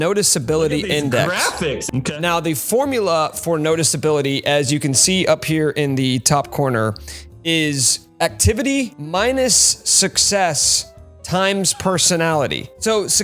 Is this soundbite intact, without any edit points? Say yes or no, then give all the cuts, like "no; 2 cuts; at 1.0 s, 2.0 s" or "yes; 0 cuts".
yes; 0 cuts